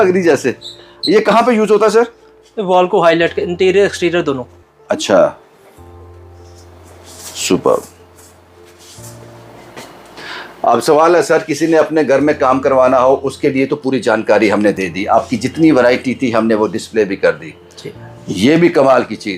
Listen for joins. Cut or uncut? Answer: uncut